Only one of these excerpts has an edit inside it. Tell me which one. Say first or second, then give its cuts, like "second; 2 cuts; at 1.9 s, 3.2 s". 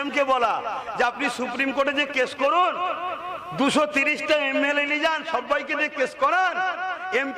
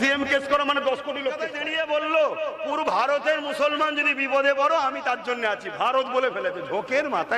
second; 1 cut; at 1.5 s